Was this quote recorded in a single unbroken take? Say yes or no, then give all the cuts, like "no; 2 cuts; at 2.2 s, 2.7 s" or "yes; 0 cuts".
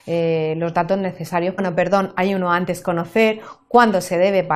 yes; 0 cuts